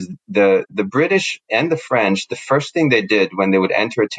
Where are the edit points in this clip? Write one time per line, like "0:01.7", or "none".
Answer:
none